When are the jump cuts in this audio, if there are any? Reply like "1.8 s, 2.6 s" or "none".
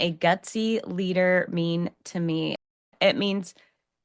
2.6 s